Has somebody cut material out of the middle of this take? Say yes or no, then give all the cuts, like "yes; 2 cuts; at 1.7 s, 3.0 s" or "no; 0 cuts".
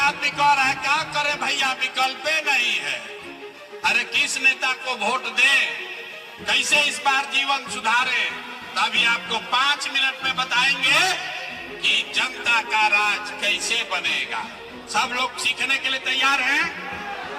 no; 0 cuts